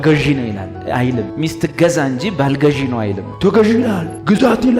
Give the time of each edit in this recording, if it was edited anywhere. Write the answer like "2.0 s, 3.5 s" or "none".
3.2 s